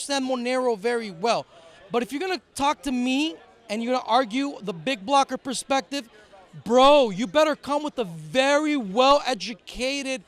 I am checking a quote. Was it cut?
no; 0 cuts

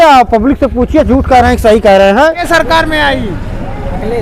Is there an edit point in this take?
yes; 1 cut; at 2.5 s

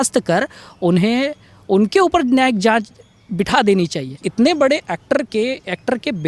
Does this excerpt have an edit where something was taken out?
yes; 1 cut; at 4.2 s

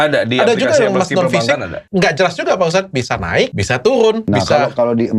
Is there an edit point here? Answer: yes; 3 cuts; at 1.8 s, 3.6 s, 4.2 s

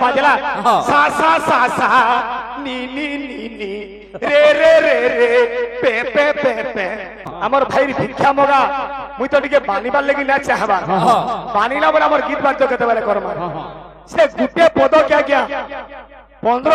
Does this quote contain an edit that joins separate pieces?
yes; 1 cut; at 7.3 s

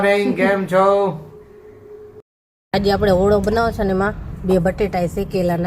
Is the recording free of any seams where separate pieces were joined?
no; 1 cut; at 2.3 s

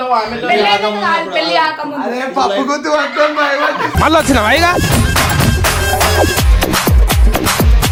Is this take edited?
no; 0 cuts

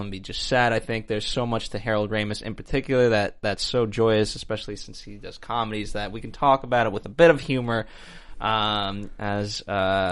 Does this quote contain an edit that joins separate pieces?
yes; 1 cut; at 7.3 s

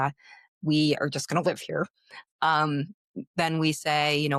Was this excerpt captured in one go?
yes; 0 cuts

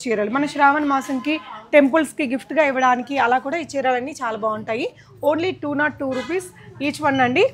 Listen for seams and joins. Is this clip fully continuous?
yes; 0 cuts

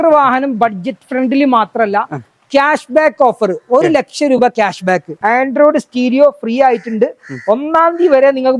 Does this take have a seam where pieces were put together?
yes; 1 cut; at 5.1 s

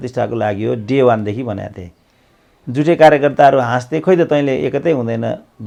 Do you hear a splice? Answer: no; 0 cuts

